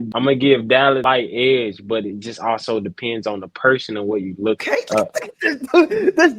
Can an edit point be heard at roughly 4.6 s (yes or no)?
yes